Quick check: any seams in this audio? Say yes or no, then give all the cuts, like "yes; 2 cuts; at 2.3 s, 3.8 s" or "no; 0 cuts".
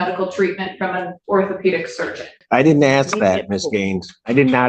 yes; 1 cut; at 2.4 s